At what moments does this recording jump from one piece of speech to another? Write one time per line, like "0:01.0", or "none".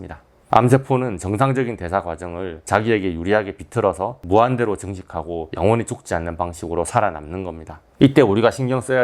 0:07.8